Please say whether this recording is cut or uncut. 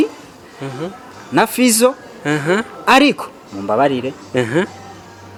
uncut